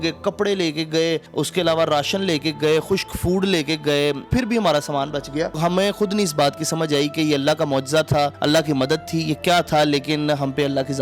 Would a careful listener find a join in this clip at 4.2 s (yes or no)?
yes